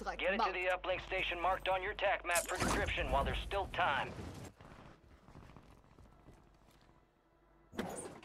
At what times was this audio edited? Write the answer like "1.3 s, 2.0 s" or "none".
4.5 s